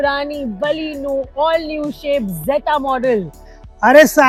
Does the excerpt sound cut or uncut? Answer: uncut